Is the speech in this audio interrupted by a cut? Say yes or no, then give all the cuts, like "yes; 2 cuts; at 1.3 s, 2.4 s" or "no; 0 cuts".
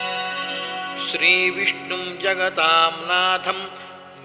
yes; 1 cut; at 0.9 s